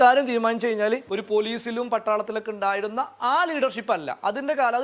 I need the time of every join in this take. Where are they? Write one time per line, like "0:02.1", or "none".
0:01.1